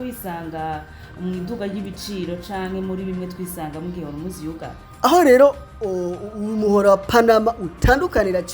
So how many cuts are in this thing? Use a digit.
1